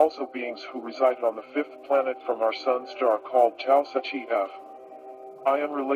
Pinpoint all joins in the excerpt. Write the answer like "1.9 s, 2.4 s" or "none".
2.2 s